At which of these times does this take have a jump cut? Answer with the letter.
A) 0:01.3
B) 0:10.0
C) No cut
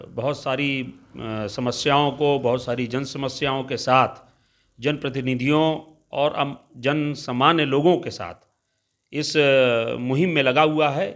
C